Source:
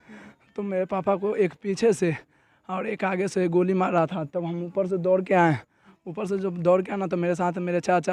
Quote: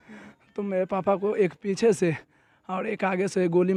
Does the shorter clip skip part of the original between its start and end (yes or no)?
no